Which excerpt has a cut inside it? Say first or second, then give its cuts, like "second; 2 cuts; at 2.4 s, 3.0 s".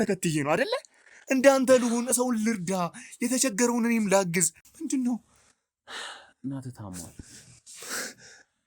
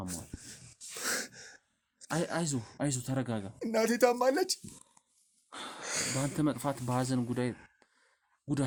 first; 1 cut; at 4.6 s